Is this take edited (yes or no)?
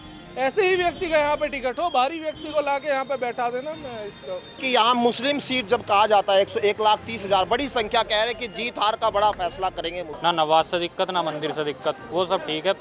yes